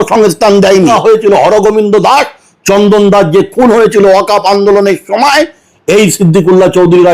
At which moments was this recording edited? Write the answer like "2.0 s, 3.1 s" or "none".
0.9 s